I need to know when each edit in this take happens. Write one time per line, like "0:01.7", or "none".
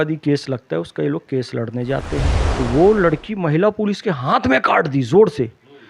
0:02.4